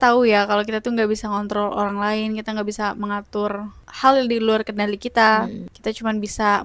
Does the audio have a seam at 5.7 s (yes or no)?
yes